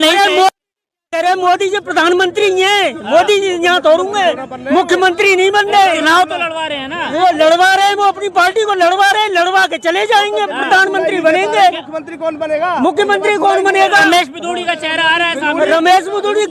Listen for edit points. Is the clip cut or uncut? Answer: uncut